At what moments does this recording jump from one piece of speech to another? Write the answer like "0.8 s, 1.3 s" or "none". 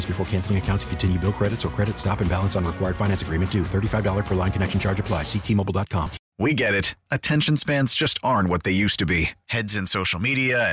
6.2 s